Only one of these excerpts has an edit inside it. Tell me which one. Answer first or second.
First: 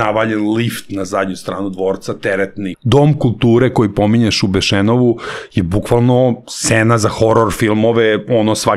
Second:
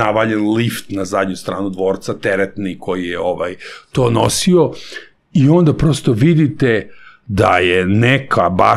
first